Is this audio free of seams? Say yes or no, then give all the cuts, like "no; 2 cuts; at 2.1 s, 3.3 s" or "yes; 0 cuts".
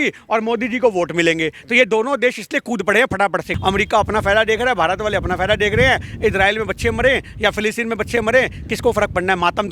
no; 1 cut; at 3.5 s